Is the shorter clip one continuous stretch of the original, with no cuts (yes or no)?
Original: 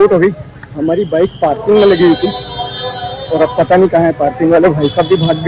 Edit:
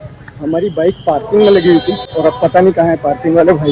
no